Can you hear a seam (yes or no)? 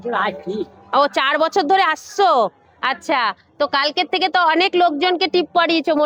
no